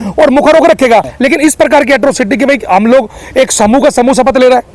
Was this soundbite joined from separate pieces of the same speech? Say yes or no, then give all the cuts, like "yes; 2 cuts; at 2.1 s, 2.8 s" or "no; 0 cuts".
yes; 1 cut; at 1.1 s